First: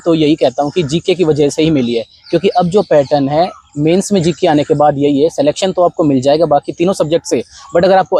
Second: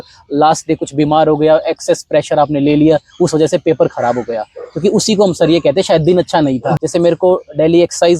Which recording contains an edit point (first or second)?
second